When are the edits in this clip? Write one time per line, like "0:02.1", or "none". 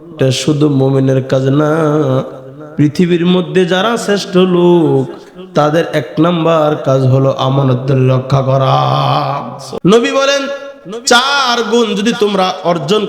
0:09.6